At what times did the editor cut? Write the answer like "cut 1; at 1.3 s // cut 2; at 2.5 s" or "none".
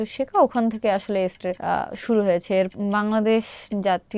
cut 1; at 1.5 s // cut 2; at 2.7 s